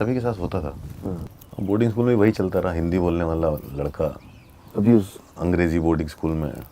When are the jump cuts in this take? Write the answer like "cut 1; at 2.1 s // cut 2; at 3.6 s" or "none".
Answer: cut 1; at 1.4 s